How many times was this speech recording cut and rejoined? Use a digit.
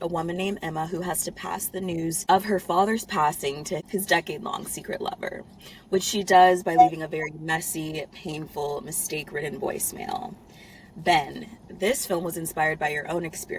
2